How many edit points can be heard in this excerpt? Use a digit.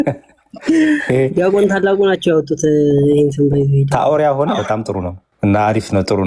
1